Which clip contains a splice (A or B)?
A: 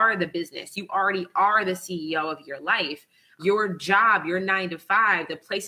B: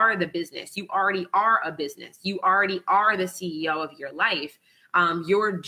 A